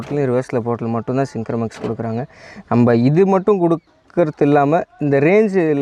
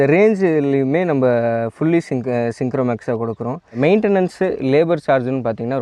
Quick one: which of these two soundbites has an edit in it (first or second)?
second